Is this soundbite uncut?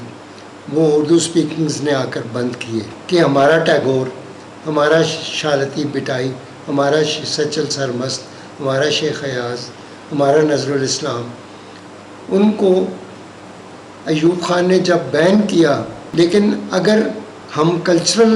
no; 2 cuts; at 2.9 s, 16.0 s

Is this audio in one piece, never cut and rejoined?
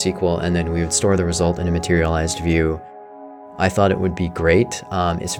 no; 1 cut; at 3.4 s

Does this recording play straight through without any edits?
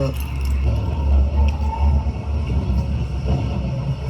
no; 1 cut; at 0.9 s

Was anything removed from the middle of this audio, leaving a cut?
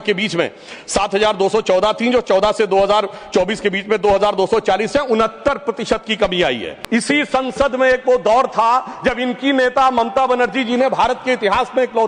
yes; 1 cut; at 6.7 s

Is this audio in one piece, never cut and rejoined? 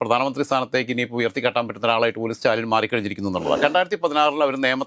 no; 1 cut; at 3.6 s

